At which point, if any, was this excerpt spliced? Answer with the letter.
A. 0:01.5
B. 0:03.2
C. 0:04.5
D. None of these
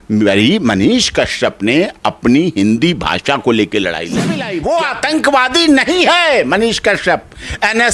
C